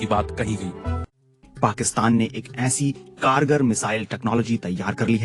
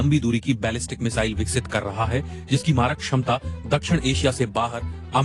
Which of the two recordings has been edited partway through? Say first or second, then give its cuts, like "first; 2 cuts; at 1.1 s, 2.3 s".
first; 1 cut; at 1.5 s